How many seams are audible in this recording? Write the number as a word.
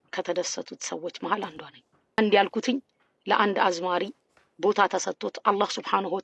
one